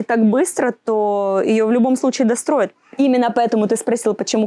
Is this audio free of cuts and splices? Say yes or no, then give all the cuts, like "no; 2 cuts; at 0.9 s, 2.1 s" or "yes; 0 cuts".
no; 1 cut; at 2.8 s